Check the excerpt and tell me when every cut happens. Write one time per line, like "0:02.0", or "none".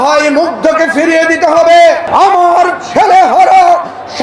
0:02.0